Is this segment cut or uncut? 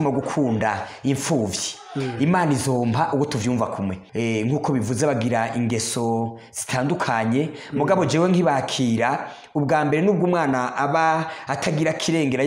cut